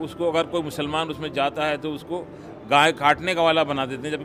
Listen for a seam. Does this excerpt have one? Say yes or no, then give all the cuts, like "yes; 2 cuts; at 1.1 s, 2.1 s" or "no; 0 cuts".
no; 0 cuts